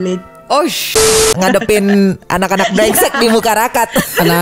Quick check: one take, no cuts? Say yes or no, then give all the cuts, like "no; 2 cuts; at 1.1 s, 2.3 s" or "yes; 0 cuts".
no; 1 cut; at 1.3 s